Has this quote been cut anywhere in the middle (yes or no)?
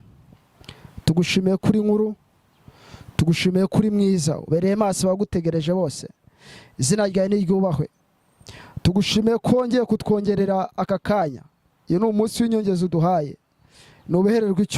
no